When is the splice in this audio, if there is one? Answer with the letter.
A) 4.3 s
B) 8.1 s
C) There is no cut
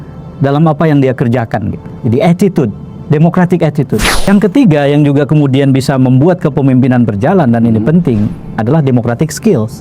A